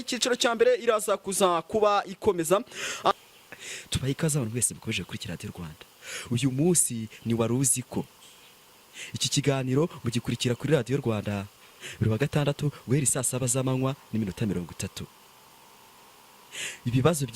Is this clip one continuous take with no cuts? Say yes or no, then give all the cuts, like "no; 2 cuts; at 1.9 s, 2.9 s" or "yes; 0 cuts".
no; 1 cut; at 3.1 s